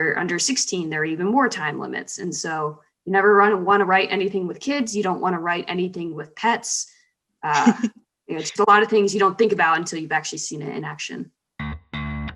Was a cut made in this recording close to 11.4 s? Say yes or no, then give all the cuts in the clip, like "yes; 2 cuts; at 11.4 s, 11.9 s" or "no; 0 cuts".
yes; 1 cut; at 11.4 s